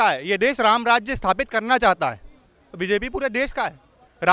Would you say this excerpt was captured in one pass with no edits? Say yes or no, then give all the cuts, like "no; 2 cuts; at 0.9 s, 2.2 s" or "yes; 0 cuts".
yes; 0 cuts